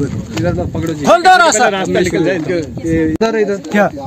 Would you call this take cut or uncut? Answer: uncut